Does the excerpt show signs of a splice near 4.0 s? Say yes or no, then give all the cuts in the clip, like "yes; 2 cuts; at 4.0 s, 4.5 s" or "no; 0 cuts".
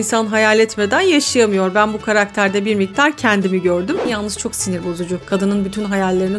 yes; 1 cut; at 4.0 s